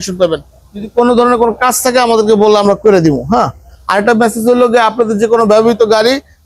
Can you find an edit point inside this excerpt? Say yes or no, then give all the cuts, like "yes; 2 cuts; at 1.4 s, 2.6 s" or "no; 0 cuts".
no; 0 cuts